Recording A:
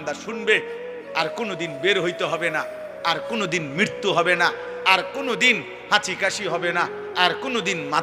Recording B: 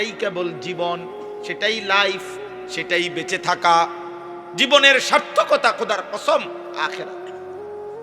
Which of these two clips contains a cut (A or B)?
B